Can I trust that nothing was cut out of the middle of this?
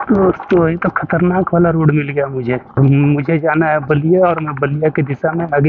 no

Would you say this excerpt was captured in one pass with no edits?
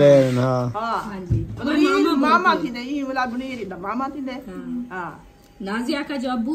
no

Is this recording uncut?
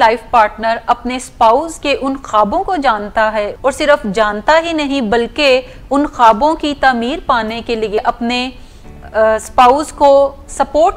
no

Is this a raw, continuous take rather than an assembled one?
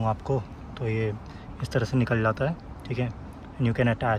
yes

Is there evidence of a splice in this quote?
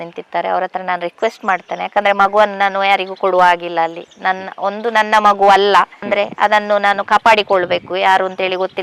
no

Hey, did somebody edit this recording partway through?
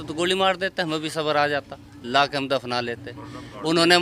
no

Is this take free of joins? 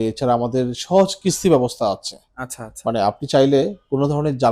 yes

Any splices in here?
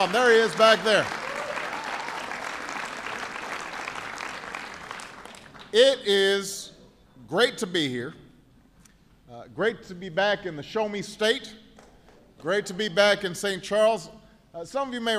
no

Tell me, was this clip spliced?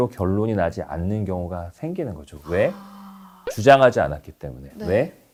no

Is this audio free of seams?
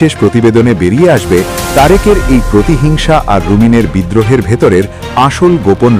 yes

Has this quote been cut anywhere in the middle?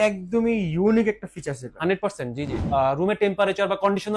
yes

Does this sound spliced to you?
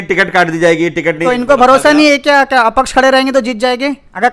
yes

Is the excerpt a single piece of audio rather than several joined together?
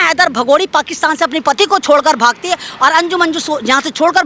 yes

